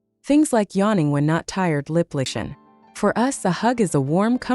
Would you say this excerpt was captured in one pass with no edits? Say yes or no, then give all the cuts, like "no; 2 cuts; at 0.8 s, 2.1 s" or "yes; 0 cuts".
no; 1 cut; at 2.3 s